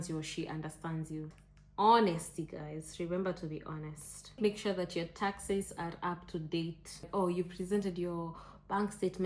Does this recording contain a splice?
yes; 3 cuts; at 1.4 s, 4.4 s, 7.0 s

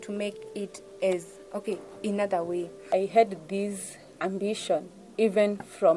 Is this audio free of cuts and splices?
no; 1 cut; at 2.8 s

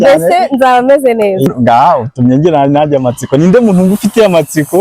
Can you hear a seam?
yes; 1 cut; at 1.5 s

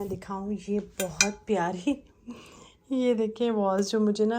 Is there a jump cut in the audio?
no; 0 cuts

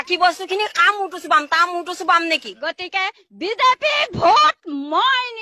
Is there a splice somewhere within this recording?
yes; 1 cut; at 2.5 s

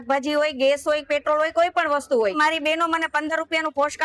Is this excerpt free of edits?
no; 1 cut; at 2.4 s

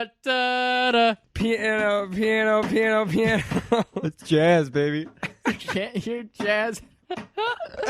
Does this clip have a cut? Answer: yes; 2 cuts; at 1.3 s, 6.9 s

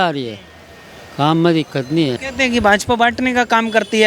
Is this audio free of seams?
no; 1 cut; at 2.2 s

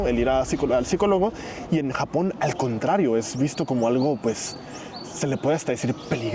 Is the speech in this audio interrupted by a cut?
no; 0 cuts

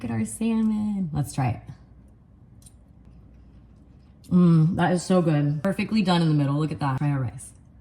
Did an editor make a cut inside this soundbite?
yes; 3 cuts; at 3.1 s, 5.6 s, 7.0 s

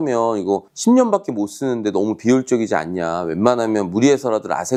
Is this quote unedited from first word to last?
yes; 0 cuts

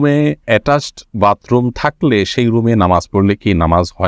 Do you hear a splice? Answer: no; 0 cuts

